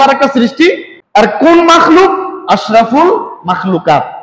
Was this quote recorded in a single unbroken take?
no; 1 cut; at 1.0 s

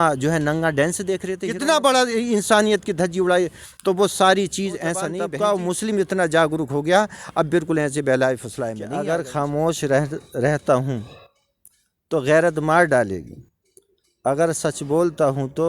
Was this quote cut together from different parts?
yes; 3 cuts; at 1.4 s, 5.2 s, 8.8 s

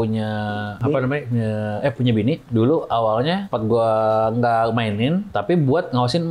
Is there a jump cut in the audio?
no; 0 cuts

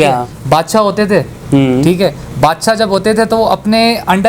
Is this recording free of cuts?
yes; 0 cuts

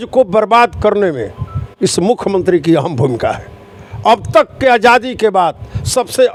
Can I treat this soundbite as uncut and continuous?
yes; 0 cuts

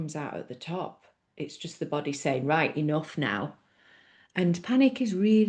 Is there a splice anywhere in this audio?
no; 0 cuts

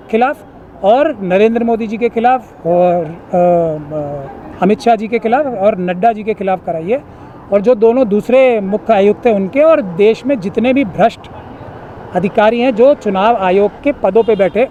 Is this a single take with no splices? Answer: yes; 0 cuts

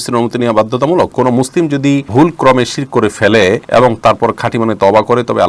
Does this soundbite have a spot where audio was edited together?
yes; 3 cuts; at 1.1 s, 2.1 s, 3.6 s

